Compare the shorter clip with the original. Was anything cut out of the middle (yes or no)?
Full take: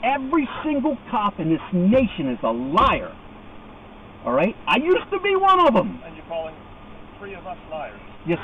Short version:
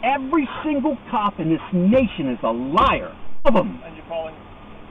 yes